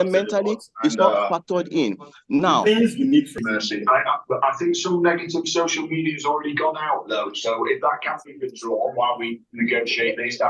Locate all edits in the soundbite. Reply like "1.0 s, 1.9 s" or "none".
3.4 s